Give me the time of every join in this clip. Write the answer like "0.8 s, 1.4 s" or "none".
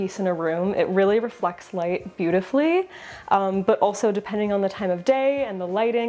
none